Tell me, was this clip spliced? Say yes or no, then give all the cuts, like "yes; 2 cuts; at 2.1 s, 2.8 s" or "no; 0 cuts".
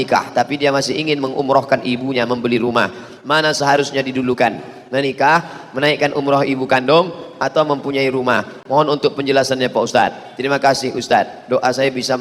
no; 0 cuts